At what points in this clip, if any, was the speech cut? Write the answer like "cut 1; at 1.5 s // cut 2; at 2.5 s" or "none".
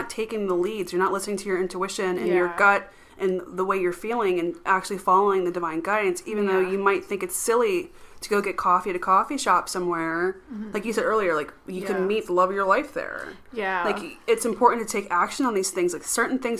none